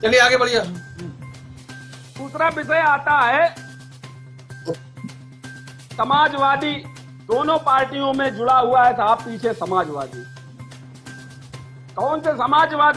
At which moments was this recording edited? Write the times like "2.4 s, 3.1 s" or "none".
10.3 s, 11.9 s